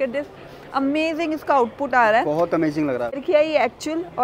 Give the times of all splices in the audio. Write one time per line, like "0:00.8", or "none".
0:03.2